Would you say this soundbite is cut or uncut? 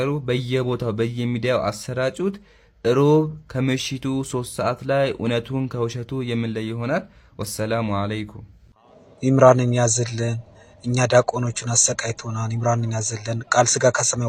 uncut